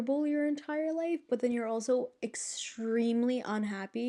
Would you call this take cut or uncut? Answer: uncut